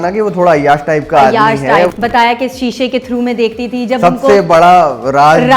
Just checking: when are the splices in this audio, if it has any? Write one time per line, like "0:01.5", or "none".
0:01.9